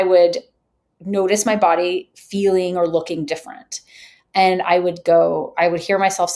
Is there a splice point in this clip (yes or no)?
no